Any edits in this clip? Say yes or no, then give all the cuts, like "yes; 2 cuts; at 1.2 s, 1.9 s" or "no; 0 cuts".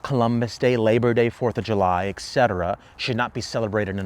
no; 0 cuts